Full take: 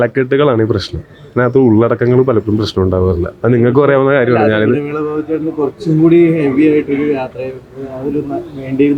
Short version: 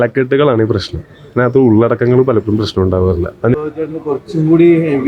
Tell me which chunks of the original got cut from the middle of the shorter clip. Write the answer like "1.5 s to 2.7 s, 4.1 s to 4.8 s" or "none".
3.5 s to 5.1 s